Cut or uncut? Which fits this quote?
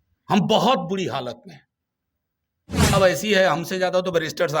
cut